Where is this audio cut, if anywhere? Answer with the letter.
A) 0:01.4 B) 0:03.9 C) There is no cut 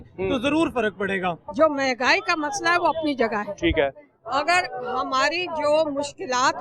A